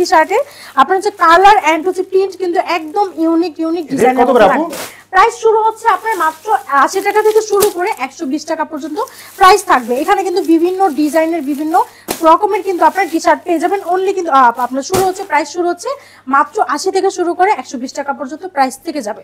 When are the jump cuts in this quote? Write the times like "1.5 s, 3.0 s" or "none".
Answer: none